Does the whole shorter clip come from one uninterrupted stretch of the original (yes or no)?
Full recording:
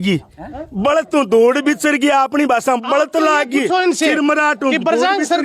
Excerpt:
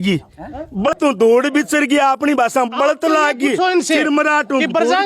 no